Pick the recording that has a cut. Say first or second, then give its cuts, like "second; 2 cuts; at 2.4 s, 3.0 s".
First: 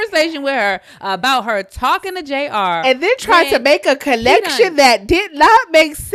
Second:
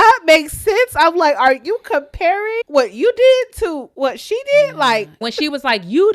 second; 2 cuts; at 3.8 s, 5.3 s